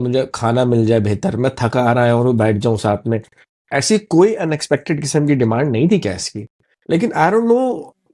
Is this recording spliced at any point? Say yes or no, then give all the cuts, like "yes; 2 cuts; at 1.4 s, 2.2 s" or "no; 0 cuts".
no; 0 cuts